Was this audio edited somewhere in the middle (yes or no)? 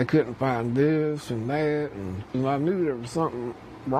no